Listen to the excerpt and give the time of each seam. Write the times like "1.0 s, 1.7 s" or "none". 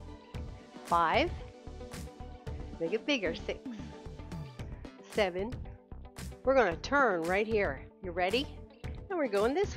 0.9 s, 1.3 s, 2.8 s, 3.6 s, 5.1 s